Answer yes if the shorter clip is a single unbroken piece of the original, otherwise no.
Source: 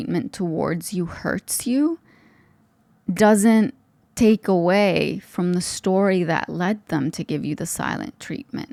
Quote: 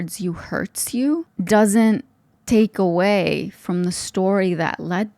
no